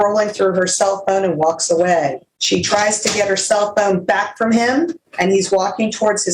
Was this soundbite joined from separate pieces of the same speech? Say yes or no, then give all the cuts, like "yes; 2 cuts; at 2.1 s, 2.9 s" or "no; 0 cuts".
yes; 2 cuts; at 2.3 s, 5.0 s